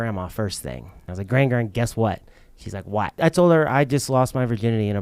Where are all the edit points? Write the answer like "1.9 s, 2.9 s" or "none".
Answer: 1.1 s, 3.2 s